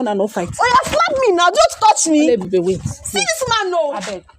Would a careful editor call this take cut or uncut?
uncut